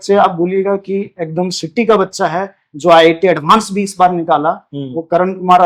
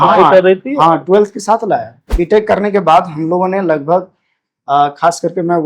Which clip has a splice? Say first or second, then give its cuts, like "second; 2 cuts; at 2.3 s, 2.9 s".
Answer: second; 1 cut; at 2.1 s